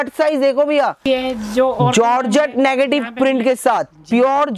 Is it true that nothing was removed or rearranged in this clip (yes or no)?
no